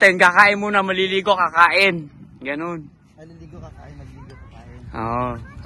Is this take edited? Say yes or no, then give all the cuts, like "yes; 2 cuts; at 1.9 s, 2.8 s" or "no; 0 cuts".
no; 0 cuts